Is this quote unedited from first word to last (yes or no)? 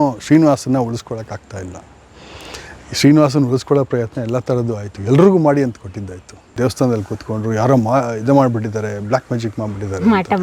no